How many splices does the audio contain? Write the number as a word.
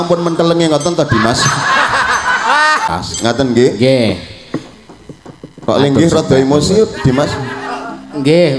one